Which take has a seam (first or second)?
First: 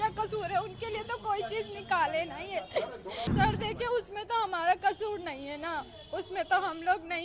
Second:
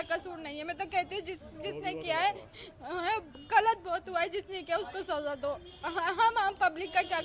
first